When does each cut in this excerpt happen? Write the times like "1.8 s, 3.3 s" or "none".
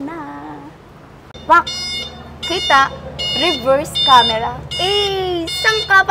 1.3 s